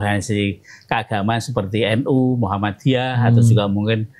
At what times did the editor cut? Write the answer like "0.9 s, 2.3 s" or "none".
none